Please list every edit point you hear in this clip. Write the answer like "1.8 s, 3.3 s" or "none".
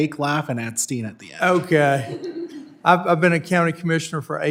none